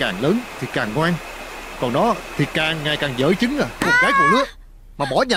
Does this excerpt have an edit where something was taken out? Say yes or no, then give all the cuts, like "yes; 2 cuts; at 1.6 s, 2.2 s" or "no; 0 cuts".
yes; 1 cut; at 3.7 s